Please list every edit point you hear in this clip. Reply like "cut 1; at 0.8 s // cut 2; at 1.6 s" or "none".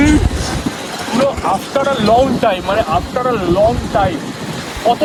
none